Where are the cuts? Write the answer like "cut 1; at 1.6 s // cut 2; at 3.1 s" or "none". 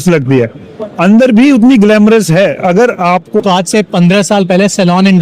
cut 1; at 3.4 s